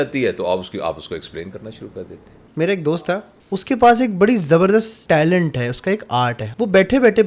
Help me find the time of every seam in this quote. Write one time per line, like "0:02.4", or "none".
0:02.8
0:05.0
0:06.4